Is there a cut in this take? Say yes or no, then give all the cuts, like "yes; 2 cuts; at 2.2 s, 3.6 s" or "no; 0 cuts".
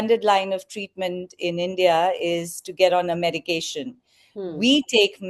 no; 0 cuts